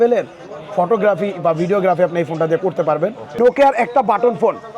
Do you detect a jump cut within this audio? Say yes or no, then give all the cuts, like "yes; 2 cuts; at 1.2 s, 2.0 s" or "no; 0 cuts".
yes; 1 cut; at 3.4 s